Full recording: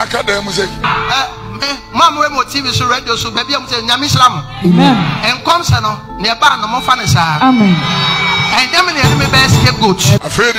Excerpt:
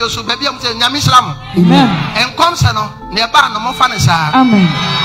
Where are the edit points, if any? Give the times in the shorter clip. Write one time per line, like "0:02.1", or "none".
none

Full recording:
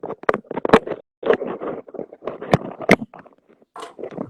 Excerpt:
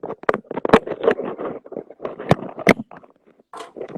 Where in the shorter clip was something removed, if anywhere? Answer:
0:00.9

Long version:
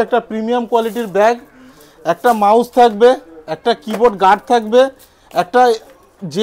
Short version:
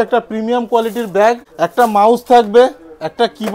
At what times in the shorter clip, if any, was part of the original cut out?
0:01.5

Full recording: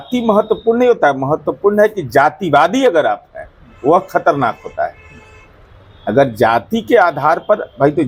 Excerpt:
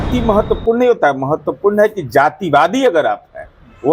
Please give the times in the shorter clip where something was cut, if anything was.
none

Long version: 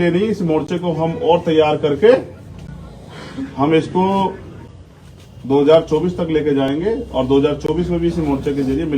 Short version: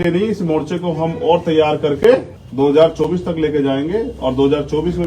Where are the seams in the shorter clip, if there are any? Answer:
0:02.4

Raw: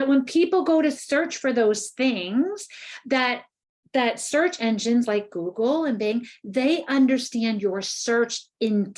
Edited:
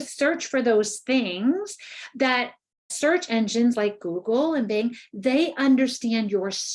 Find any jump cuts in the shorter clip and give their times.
0:02.9

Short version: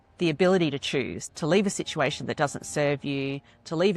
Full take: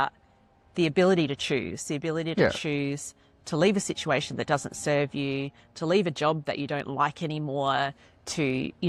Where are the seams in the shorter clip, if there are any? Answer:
0:01.2

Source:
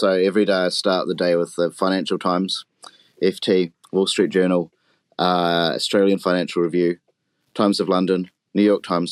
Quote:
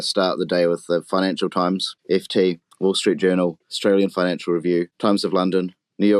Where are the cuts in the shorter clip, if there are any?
0:01.9
0:03.7
0:04.9

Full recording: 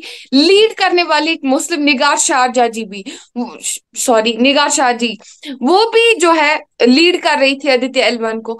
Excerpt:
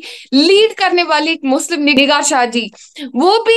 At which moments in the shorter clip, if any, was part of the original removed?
0:02.0

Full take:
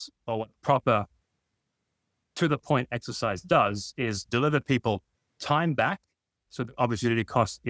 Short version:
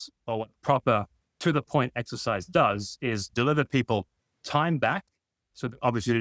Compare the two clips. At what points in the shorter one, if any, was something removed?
0:01.2

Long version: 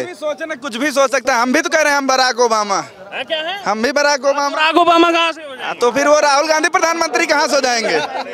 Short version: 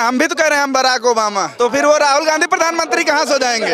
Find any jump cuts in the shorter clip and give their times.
0:01.5

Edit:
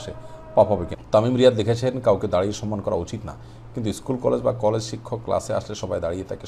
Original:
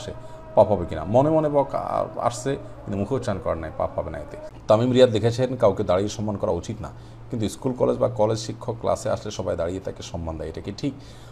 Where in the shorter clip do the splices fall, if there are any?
0:00.9

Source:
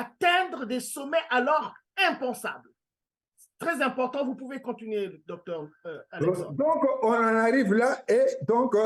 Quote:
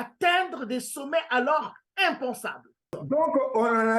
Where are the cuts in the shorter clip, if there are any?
0:03.0

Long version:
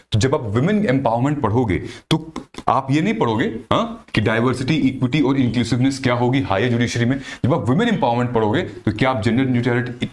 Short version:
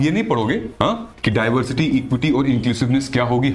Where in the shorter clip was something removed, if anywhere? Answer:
none

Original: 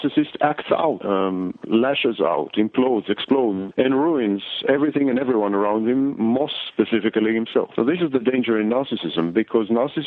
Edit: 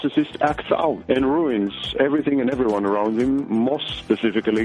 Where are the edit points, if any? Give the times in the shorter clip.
0:01.0

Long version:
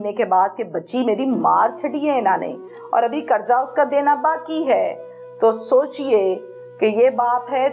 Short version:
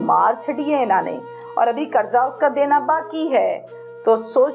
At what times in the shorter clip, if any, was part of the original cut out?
none

